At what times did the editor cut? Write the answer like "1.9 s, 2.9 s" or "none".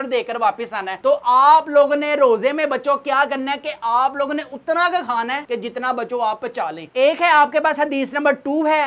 6.8 s